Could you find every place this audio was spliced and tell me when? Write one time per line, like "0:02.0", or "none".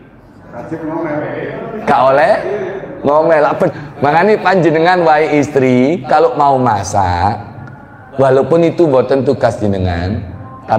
0:03.7